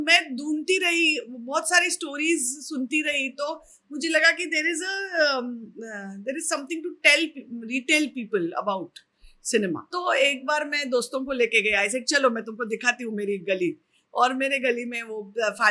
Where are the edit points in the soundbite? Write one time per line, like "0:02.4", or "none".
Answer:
0:09.9